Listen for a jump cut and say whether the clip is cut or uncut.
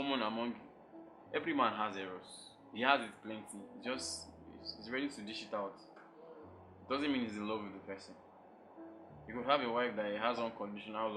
uncut